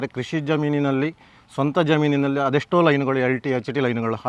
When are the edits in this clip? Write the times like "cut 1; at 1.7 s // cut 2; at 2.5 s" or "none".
none